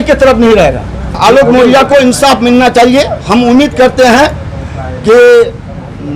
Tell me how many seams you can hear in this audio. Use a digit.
1